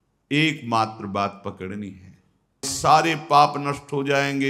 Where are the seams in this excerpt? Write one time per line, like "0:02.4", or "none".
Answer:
0:02.7